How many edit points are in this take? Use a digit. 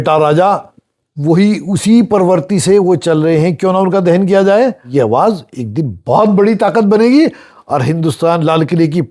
1